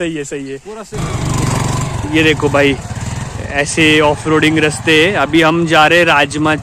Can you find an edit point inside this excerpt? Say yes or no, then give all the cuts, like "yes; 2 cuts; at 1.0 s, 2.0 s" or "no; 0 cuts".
yes; 1 cut; at 1.0 s